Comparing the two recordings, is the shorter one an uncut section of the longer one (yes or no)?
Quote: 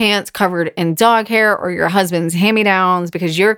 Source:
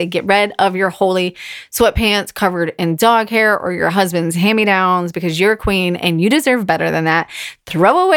yes